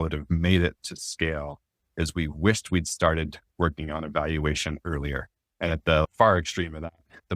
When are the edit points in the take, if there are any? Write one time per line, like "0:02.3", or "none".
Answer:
none